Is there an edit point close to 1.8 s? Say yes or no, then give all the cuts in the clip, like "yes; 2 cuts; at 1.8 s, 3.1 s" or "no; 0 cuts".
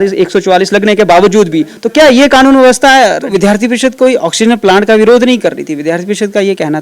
no; 1 cut; at 3.2 s